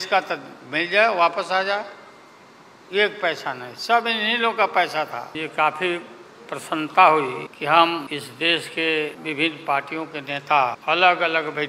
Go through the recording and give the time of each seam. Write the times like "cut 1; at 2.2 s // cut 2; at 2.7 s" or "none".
cut 1; at 5.3 s // cut 2; at 7.5 s // cut 3; at 8.1 s // cut 4; at 9.2 s // cut 5; at 10.8 s